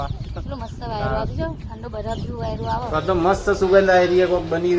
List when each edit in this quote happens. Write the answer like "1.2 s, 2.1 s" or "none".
2.9 s